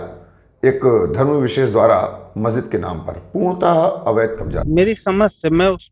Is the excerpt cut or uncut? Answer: cut